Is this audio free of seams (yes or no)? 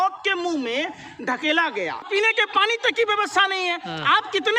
no